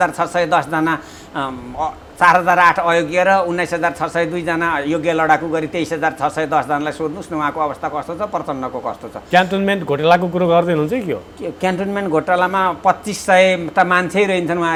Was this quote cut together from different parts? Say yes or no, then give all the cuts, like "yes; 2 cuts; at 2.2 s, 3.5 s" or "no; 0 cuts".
no; 0 cuts